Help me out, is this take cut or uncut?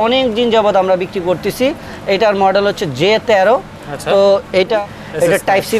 cut